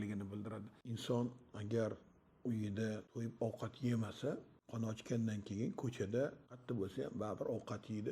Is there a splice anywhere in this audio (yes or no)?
yes